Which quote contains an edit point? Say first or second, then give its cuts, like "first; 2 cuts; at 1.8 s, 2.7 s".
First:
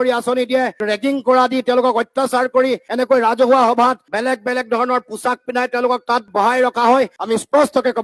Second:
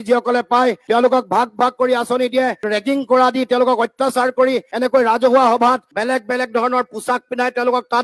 first; 1 cut; at 7.2 s